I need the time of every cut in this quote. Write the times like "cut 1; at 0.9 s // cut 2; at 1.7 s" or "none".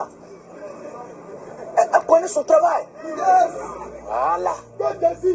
cut 1; at 4.0 s